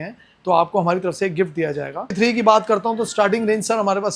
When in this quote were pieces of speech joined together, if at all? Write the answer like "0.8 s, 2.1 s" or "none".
2.1 s

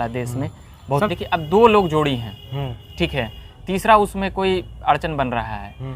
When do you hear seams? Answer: 1.1 s

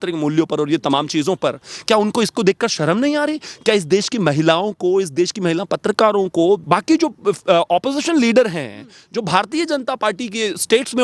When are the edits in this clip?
6.6 s

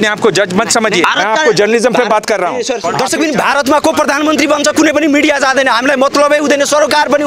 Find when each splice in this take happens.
1.0 s, 2.8 s

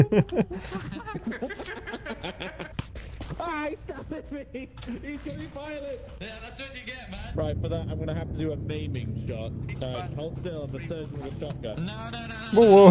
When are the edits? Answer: 2.7 s

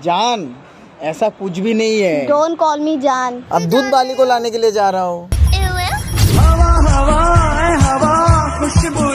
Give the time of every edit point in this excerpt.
3.4 s

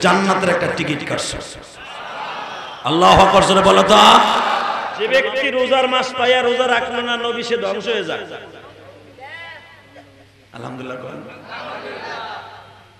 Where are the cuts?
5.1 s

